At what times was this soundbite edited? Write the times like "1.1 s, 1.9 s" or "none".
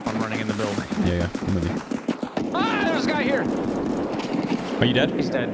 1.9 s